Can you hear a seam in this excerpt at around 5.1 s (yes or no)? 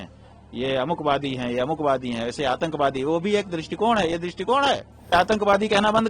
yes